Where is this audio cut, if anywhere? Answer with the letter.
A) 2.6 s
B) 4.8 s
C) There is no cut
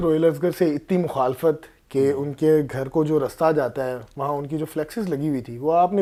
C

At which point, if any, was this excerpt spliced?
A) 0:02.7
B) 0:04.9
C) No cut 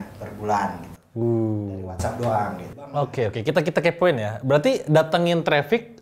A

